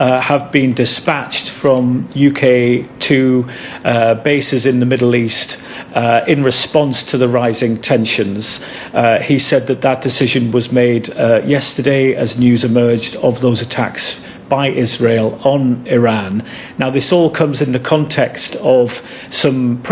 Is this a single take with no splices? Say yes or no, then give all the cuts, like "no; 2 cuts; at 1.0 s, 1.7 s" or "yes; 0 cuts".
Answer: yes; 0 cuts